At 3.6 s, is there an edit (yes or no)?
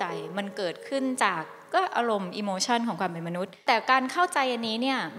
yes